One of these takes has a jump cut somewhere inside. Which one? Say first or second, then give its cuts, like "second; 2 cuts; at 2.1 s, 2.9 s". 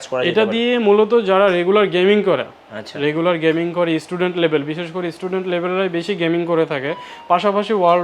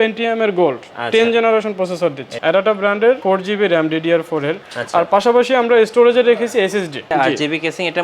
second; 3 cuts; at 2.3 s, 3.2 s, 7.1 s